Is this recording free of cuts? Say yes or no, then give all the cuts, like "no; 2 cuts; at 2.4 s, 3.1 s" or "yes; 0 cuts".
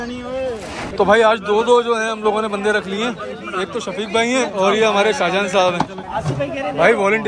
no; 3 cuts; at 0.9 s, 4.5 s, 6.0 s